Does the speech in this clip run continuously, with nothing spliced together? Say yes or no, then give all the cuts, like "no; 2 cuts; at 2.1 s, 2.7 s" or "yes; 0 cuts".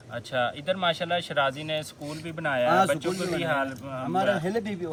yes; 0 cuts